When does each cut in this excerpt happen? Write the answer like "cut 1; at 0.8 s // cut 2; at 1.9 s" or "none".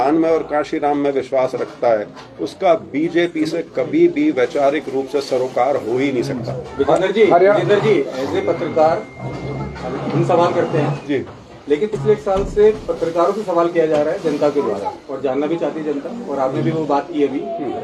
none

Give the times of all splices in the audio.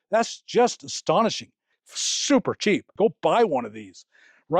cut 1; at 2.9 s

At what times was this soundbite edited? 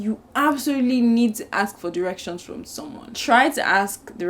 cut 1; at 3.1 s

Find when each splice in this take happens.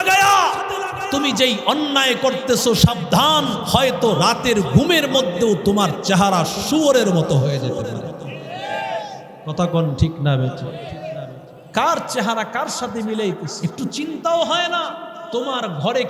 cut 1; at 3.7 s // cut 2; at 13.5 s // cut 3; at 15.1 s

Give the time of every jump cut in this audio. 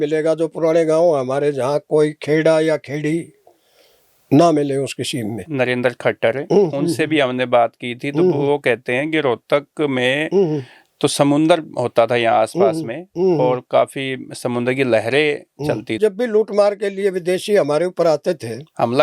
cut 1; at 5.4 s // cut 2; at 16.0 s

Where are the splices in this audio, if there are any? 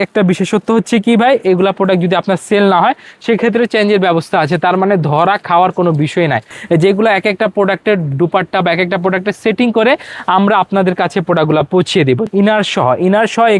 cut 1; at 6.5 s // cut 2; at 12.2 s

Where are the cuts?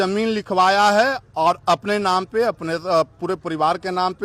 none

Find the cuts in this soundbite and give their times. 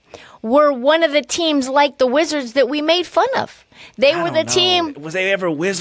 none

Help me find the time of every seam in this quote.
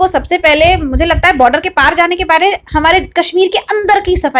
none

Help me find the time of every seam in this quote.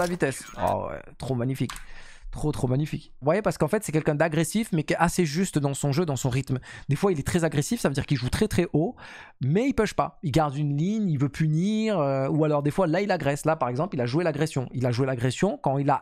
cut 1; at 3.2 s

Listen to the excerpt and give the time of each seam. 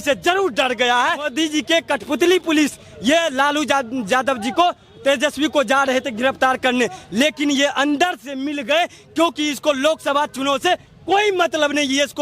cut 1; at 1.3 s

